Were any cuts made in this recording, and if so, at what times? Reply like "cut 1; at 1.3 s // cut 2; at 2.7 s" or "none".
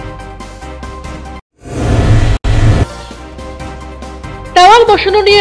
none